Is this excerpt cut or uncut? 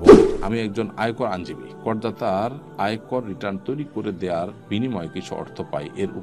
uncut